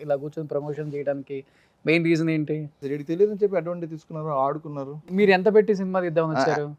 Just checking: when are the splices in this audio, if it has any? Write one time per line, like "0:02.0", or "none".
0:02.8